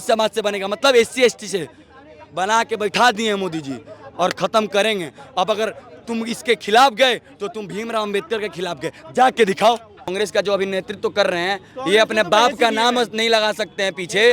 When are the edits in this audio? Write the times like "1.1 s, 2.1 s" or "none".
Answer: 10.1 s